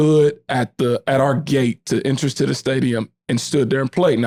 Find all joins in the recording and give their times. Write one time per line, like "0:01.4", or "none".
none